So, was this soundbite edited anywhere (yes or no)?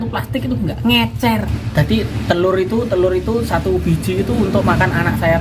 yes